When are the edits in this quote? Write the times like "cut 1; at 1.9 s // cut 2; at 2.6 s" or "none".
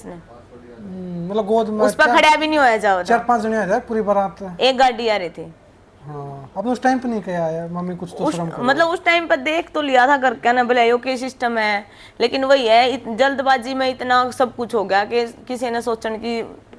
none